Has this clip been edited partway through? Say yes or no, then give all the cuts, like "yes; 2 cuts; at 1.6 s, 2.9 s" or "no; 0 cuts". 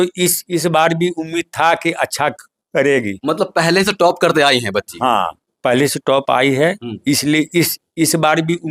no; 0 cuts